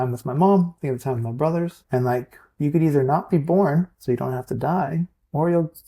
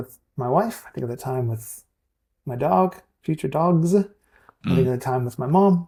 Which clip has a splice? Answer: first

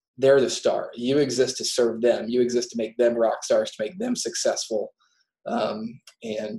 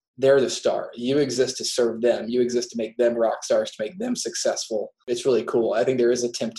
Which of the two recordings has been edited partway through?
second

